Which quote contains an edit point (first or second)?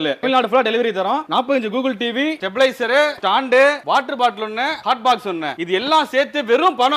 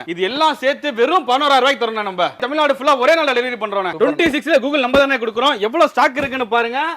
second